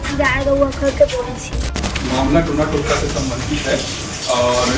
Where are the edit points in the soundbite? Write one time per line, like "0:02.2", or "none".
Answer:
0:01.8